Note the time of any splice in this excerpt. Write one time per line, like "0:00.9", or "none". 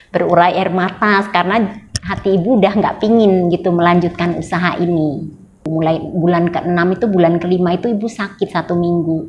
0:05.6